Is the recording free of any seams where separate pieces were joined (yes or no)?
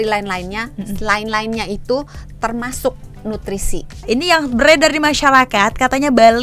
no